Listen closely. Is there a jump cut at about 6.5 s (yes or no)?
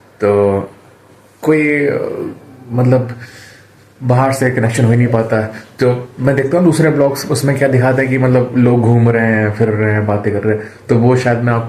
no